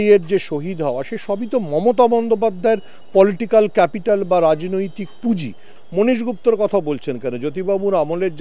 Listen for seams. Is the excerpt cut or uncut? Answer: cut